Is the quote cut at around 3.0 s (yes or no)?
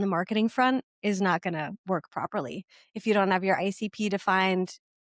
no